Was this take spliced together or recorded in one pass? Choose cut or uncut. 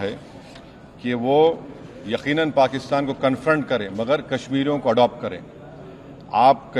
uncut